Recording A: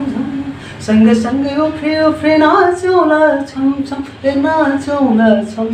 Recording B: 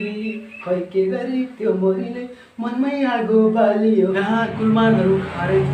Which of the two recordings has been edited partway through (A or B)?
B